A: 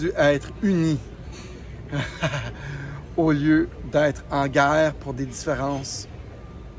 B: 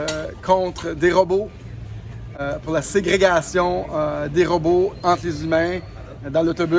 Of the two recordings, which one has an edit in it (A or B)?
B